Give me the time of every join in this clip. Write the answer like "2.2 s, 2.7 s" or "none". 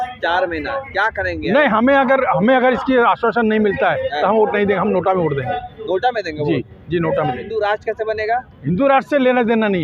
7.5 s